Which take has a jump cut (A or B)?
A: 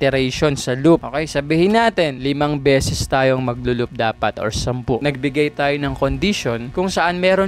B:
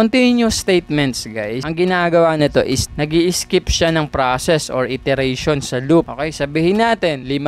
B